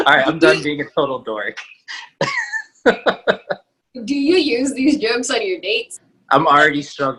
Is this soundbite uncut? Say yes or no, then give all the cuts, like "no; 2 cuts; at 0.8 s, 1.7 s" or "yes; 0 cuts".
yes; 0 cuts